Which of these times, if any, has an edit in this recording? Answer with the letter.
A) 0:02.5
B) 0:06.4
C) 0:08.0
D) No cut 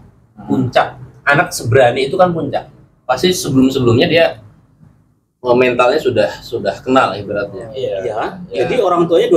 C